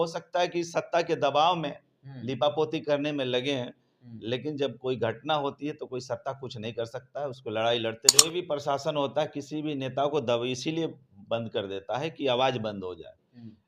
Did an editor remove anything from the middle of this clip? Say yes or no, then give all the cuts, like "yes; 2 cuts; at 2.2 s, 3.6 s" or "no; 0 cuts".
yes; 1 cut; at 8.2 s